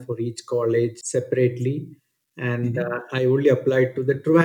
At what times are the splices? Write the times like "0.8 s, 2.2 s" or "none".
1.0 s